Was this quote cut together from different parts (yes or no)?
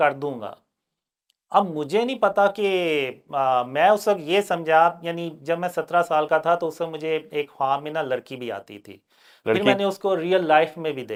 no